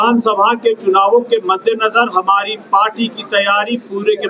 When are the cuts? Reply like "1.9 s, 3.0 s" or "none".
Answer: none